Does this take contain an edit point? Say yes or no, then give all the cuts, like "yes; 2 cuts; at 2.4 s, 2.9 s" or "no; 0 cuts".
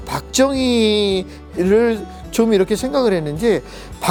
no; 0 cuts